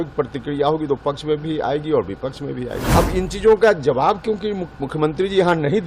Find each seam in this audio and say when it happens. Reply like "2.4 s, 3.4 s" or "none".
2.8 s